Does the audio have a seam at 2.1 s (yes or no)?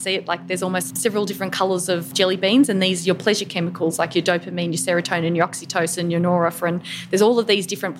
yes